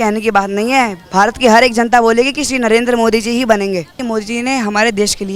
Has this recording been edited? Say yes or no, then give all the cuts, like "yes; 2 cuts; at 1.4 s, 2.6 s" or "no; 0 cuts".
yes; 1 cut; at 3.9 s